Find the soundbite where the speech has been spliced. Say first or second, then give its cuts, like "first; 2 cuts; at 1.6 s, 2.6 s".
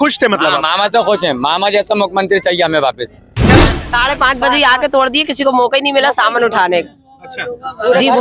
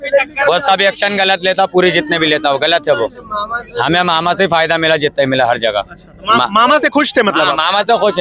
first; 1 cut; at 3.5 s